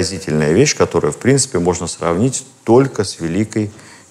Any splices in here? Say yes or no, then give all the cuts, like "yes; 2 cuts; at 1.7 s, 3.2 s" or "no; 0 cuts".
no; 0 cuts